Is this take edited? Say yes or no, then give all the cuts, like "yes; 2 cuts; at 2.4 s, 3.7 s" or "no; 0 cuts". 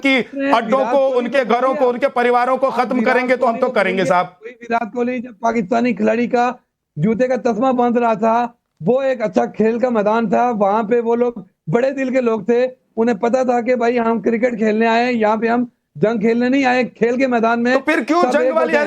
yes; 1 cut; at 14.2 s